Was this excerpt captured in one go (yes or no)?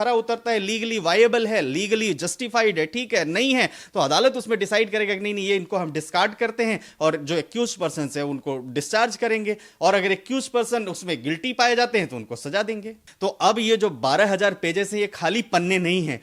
no